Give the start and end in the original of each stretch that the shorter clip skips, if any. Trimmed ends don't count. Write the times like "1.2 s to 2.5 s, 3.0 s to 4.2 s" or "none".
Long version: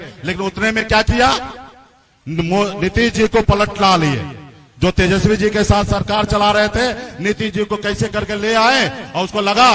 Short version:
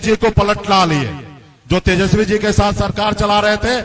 none